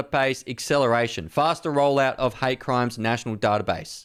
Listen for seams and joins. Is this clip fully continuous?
yes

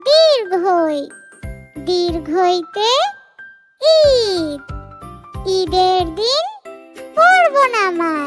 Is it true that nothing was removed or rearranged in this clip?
yes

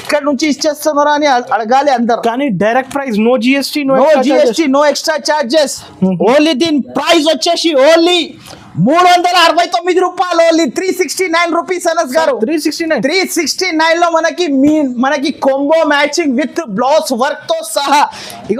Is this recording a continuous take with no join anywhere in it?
yes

